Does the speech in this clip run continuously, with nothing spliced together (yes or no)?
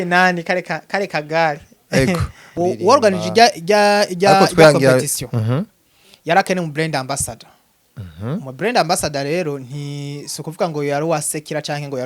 no